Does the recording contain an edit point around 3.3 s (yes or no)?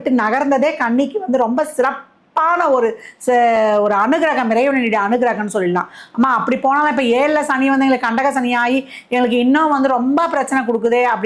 no